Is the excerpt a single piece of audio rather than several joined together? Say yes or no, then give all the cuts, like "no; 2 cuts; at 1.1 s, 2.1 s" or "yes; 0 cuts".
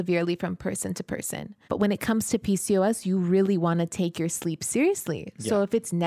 no; 1 cut; at 1.5 s